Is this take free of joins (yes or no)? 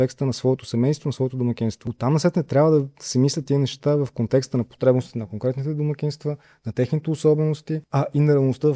no